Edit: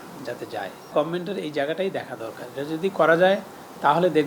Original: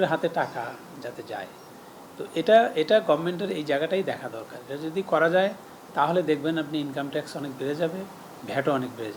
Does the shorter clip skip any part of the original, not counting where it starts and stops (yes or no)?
yes